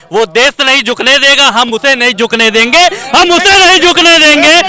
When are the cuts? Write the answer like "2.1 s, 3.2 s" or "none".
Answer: none